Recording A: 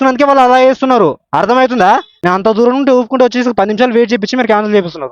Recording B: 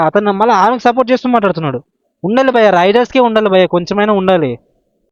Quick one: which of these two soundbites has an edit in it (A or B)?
A